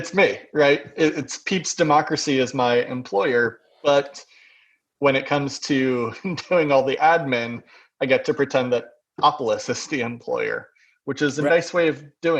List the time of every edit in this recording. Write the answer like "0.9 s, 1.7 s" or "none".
11.5 s